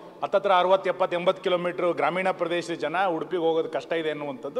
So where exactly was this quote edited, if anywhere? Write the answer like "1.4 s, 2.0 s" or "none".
none